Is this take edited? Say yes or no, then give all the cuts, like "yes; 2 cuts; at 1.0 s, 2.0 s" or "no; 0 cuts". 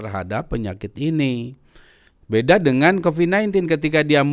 no; 0 cuts